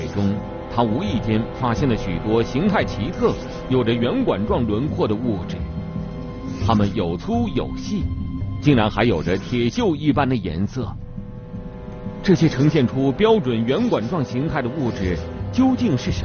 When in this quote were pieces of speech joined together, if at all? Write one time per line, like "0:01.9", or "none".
0:10.4